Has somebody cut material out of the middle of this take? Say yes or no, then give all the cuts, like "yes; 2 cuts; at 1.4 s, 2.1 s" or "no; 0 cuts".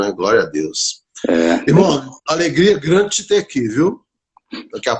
no; 0 cuts